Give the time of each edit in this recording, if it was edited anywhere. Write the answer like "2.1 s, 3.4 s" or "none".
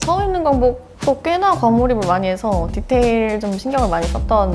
none